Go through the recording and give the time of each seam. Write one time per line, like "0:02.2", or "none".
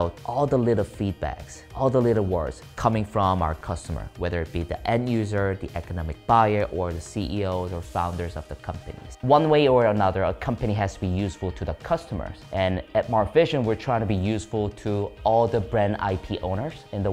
none